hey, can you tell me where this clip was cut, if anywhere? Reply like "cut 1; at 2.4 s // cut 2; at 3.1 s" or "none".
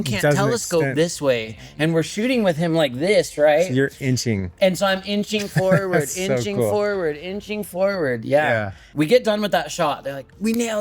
cut 1; at 8.9 s